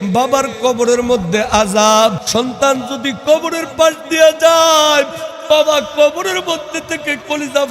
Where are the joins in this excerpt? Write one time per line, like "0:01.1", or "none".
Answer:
0:02.2